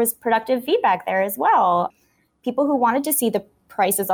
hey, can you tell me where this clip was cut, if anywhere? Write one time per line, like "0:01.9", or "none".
none